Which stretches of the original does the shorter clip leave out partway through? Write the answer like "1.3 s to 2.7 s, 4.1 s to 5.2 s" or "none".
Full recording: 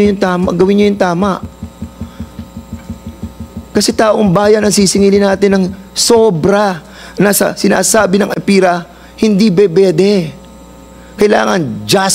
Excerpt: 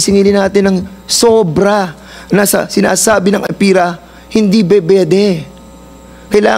none